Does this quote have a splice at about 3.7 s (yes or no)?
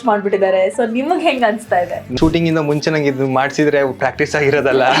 no